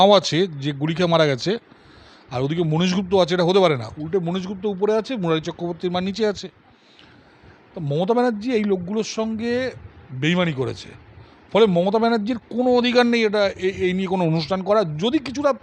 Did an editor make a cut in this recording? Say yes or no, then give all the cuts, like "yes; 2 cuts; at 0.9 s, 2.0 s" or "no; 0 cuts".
no; 0 cuts